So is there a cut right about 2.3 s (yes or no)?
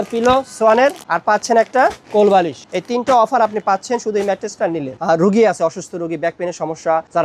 no